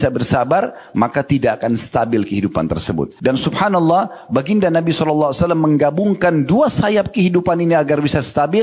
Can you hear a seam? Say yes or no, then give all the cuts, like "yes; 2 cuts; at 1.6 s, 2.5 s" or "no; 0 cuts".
yes; 1 cut; at 3.1 s